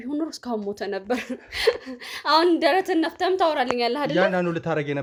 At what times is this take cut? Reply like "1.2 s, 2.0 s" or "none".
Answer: none